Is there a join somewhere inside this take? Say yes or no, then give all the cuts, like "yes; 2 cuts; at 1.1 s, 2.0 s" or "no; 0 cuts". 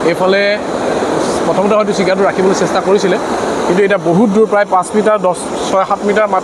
no; 0 cuts